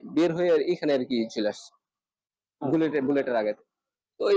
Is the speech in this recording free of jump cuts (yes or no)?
yes